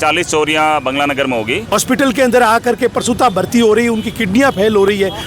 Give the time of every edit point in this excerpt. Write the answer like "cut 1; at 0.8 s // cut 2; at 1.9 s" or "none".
cut 1; at 1.7 s